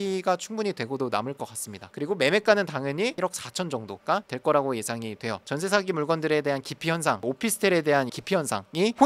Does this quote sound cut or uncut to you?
cut